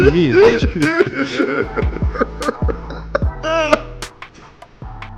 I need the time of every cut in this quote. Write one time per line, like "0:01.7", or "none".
0:03.9